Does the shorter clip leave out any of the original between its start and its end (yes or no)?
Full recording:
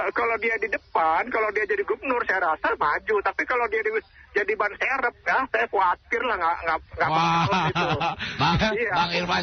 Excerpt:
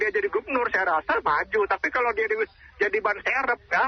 no